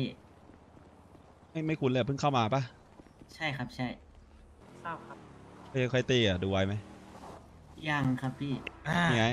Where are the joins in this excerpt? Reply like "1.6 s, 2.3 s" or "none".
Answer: 4.6 s